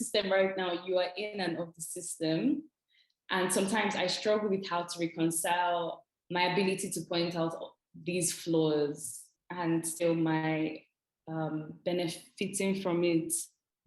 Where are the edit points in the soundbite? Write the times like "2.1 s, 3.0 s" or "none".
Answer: none